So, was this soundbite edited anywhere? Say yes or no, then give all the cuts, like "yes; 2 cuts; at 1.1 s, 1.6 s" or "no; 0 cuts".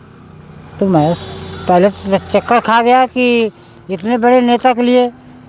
no; 0 cuts